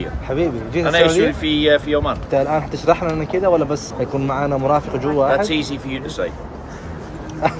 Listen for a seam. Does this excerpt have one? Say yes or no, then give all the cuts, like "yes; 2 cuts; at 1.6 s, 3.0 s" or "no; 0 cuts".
yes; 2 cuts; at 2.2 s, 3.9 s